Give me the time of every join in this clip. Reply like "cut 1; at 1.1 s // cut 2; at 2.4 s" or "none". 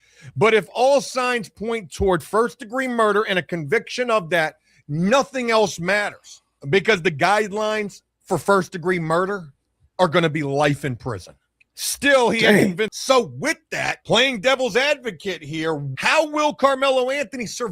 cut 1; at 12.9 s